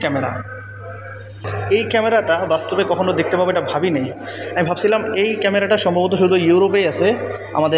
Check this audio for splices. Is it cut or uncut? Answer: cut